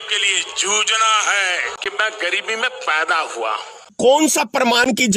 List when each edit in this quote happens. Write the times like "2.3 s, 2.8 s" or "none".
1.7 s, 3.9 s

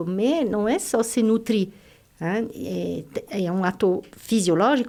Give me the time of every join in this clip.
none

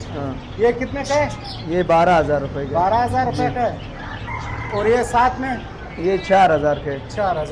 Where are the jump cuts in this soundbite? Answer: none

